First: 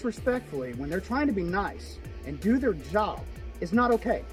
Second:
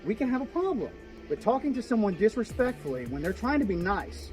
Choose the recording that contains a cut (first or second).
second